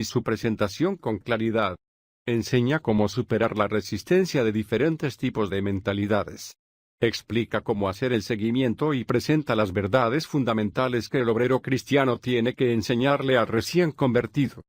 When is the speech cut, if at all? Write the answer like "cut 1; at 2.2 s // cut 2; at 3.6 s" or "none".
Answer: none